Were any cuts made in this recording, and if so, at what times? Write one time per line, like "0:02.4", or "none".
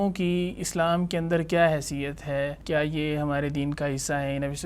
0:02.6